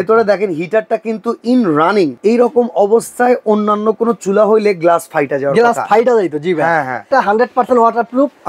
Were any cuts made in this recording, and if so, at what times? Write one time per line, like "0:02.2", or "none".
0:02.2
0:07.1